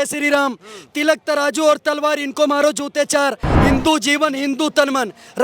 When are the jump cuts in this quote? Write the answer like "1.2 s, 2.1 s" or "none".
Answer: 3.5 s